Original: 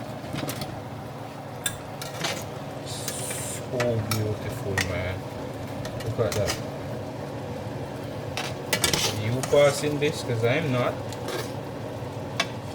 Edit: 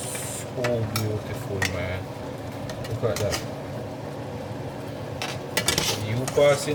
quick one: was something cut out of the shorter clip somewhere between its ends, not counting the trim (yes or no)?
no